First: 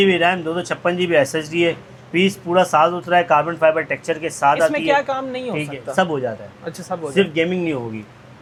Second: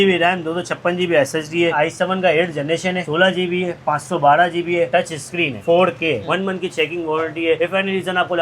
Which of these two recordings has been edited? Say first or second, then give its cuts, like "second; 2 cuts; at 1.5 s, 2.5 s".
second; 2 cuts; at 1.8 s, 6.2 s